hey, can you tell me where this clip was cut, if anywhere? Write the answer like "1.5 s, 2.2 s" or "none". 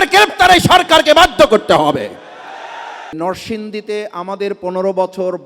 3.1 s